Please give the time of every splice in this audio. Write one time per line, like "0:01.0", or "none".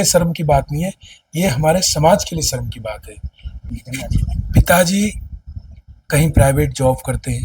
0:03.7

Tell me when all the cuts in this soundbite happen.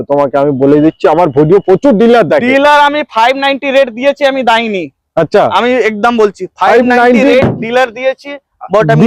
none

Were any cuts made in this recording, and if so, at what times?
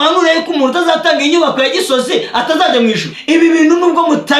0:03.1

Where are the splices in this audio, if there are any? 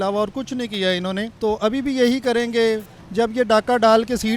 0:01.3
0:02.9

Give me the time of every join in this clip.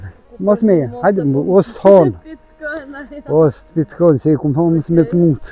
none

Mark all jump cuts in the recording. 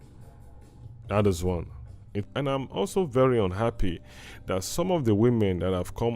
0:02.3

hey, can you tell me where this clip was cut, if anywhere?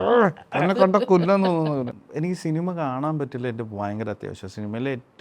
0:02.0

